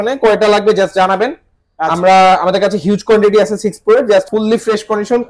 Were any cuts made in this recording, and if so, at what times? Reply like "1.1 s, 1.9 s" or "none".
4.3 s